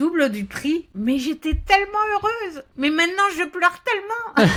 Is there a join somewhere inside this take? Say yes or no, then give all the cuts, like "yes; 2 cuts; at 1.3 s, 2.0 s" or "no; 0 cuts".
no; 0 cuts